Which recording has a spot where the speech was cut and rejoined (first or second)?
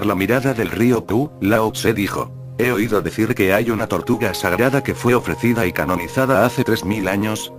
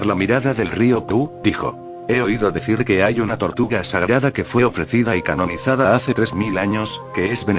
second